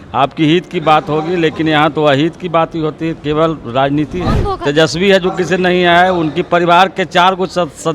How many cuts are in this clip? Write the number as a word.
one